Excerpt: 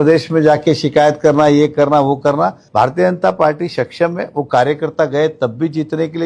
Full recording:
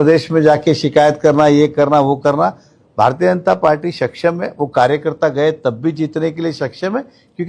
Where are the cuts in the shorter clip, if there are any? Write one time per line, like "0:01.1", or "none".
0:02.6